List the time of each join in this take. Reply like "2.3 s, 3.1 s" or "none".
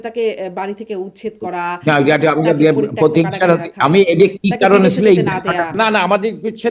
5.7 s

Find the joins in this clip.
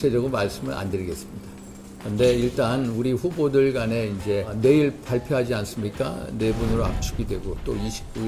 4.5 s

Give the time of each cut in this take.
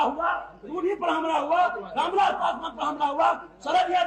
none

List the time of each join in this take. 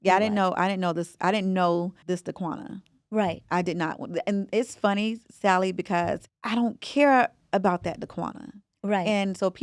2.0 s, 6.3 s

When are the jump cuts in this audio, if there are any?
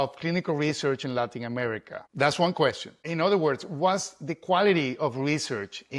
2.0 s, 3.1 s

